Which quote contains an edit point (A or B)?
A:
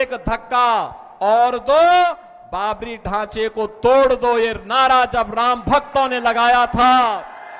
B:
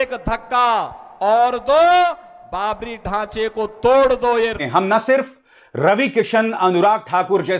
B